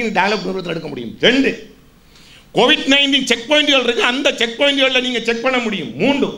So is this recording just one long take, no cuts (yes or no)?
yes